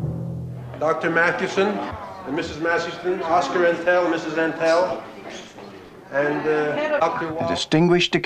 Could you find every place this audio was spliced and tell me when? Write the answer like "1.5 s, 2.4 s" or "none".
2.2 s

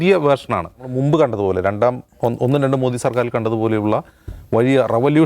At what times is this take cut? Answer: 0.9 s

